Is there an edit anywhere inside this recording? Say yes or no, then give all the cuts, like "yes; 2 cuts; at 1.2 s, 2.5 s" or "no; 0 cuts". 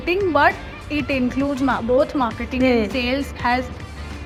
no; 0 cuts